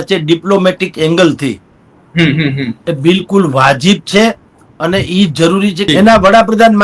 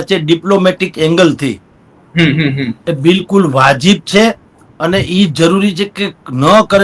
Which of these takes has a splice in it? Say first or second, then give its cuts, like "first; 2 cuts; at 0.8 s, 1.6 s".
first; 1 cut; at 5.8 s